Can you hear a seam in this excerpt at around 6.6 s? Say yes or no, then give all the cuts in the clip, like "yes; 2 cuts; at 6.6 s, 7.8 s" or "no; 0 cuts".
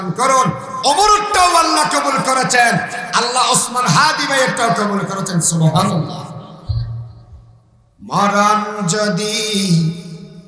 no; 0 cuts